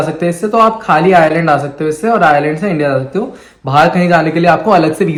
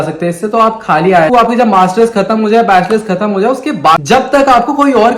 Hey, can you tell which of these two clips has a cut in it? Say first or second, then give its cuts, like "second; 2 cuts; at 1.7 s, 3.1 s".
second; 2 cuts; at 1.3 s, 4.0 s